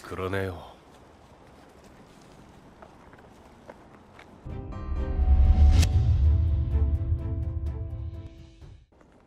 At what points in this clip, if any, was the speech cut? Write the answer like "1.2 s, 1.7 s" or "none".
none